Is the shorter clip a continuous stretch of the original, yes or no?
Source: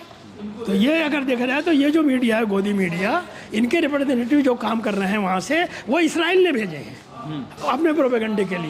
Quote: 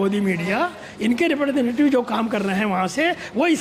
yes